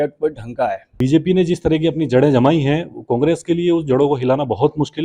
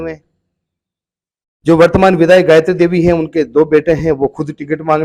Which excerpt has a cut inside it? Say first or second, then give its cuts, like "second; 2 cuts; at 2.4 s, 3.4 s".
first; 1 cut; at 0.9 s